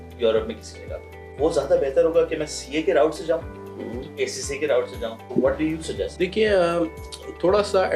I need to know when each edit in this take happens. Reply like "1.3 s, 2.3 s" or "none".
1.3 s, 4.1 s, 5.2 s, 6.1 s